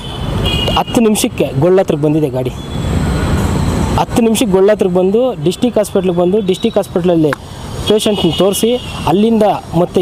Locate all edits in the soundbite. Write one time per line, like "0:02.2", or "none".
none